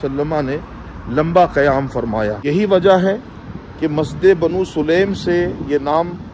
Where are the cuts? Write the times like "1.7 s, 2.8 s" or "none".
2.4 s